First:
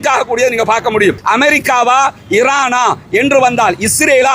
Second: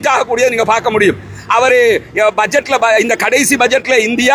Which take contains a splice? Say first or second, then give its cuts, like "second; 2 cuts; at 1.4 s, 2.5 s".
first; 1 cut; at 1.2 s